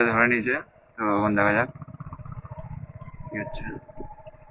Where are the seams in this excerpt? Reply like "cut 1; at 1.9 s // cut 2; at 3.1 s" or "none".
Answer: none

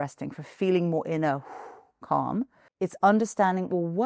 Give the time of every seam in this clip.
cut 1; at 2.6 s

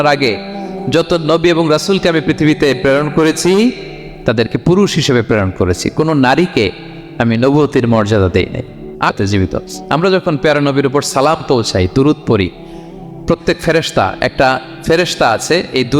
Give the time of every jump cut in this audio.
cut 1; at 9.1 s

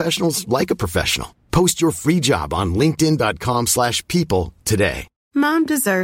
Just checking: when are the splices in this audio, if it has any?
cut 1; at 5.1 s

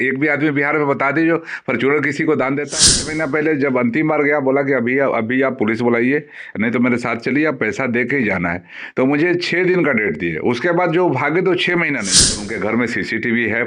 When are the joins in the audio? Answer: cut 1; at 2.9 s // cut 2; at 12.5 s

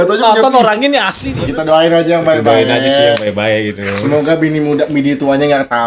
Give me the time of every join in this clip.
cut 1; at 1.4 s

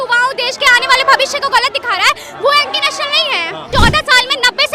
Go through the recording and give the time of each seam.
cut 1; at 3.7 s

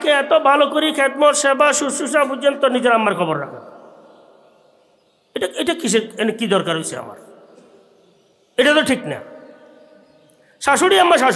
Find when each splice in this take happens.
none

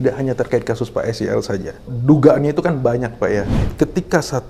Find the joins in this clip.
cut 1; at 1.9 s // cut 2; at 3.6 s

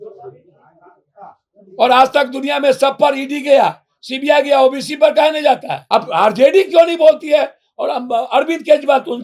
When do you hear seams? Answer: cut 1; at 5.7 s

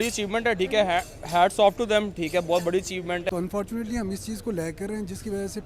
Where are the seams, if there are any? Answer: cut 1; at 3.3 s

